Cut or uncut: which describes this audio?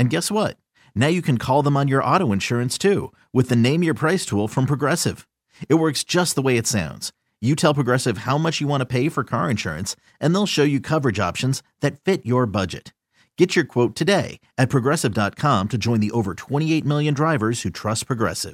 uncut